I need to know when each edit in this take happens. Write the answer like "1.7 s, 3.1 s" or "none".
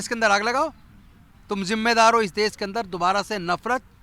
none